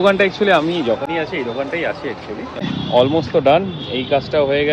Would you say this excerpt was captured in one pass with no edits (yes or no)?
no